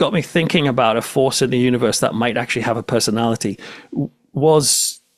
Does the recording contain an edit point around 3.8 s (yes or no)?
no